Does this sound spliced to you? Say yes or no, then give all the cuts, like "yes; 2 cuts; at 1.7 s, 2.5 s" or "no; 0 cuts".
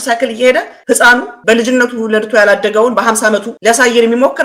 yes; 1 cut; at 3.5 s